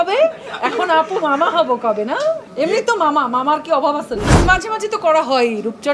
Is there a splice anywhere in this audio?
yes; 2 cuts; at 2.5 s, 4.3 s

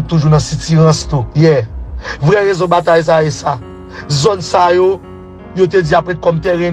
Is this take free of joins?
no; 1 cut; at 1.3 s

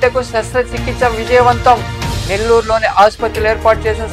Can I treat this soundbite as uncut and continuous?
yes; 0 cuts

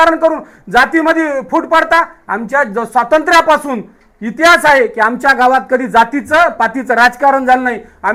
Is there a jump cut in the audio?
no; 0 cuts

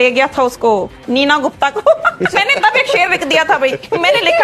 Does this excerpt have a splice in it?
yes; 1 cut; at 2.3 s

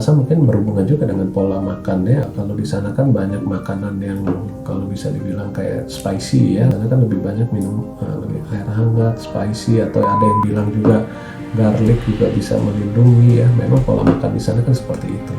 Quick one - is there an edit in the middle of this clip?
yes; 2 cuts; at 2.3 s, 6.7 s

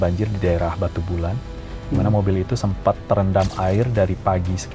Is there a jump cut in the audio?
no; 0 cuts

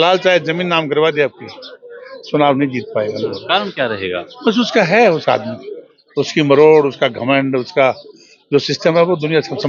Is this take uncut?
yes; 0 cuts

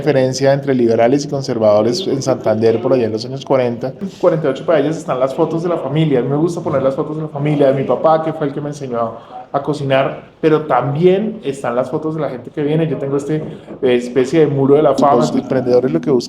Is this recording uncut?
no; 2 cuts; at 4.1 s, 15.3 s

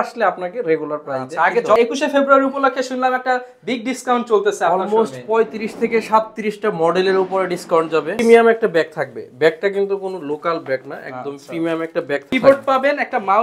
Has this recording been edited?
yes; 3 cuts; at 1.8 s, 8.2 s, 12.3 s

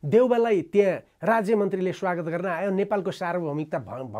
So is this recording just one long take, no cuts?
yes; 0 cuts

